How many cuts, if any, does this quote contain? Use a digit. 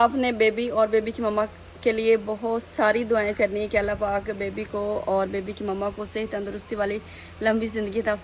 0